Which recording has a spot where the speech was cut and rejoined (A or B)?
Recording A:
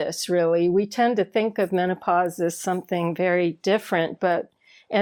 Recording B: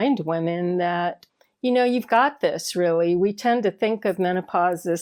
B